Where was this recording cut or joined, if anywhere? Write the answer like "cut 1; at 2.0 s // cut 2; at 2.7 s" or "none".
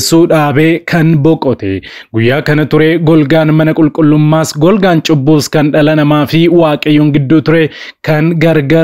cut 1; at 1.9 s